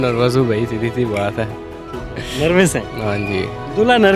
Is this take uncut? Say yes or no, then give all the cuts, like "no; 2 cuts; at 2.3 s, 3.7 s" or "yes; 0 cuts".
yes; 0 cuts